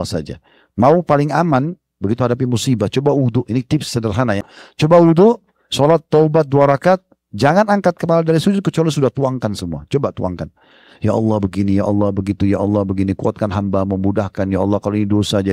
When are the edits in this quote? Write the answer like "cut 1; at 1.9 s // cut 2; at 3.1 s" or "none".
cut 1; at 4.5 s